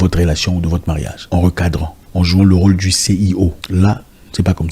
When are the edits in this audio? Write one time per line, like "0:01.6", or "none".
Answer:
0:01.1
0:02.0
0:03.6